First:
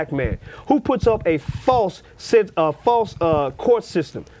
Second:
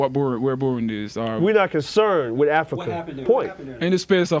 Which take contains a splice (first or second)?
second